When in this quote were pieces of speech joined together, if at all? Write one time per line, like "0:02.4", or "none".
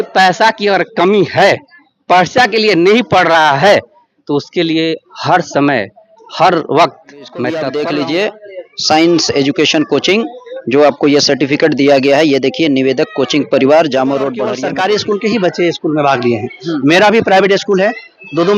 0:07.6
0:14.5